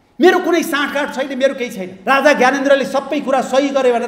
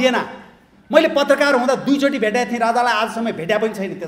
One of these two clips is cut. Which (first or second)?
first